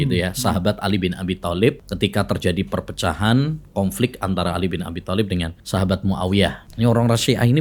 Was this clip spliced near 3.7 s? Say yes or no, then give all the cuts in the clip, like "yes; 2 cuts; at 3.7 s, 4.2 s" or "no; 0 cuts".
no; 3 cuts; at 1.9 s, 5.6 s, 6.6 s